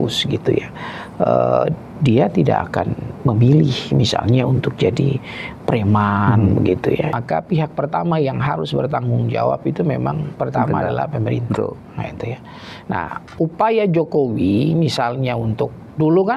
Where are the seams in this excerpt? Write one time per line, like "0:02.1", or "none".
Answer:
0:07.1